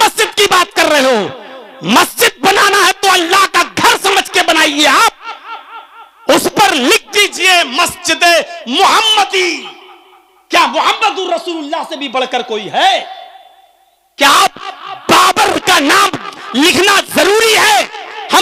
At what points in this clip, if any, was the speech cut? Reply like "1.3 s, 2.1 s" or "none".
none